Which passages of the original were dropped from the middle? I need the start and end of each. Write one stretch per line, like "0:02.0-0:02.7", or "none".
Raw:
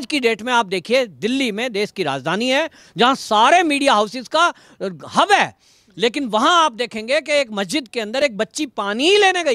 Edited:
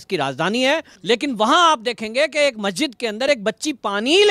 0:02.8-0:05.9